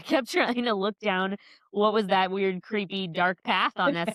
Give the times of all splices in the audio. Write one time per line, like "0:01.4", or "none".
none